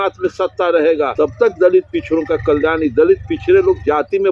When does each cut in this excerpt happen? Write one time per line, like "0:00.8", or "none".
0:01.1